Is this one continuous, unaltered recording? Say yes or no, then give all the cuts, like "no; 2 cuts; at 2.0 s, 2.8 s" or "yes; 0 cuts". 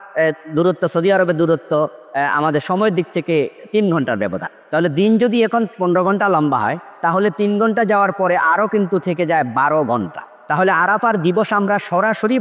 yes; 0 cuts